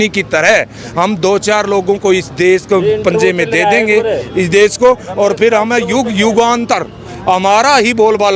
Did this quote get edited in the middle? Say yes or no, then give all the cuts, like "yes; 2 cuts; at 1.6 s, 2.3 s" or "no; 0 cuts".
no; 0 cuts